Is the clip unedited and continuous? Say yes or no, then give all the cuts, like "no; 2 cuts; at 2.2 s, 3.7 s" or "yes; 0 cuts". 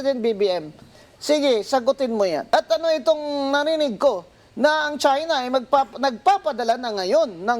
no; 1 cut; at 2.4 s